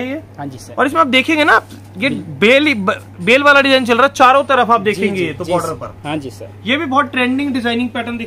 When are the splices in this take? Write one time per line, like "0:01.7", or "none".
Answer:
none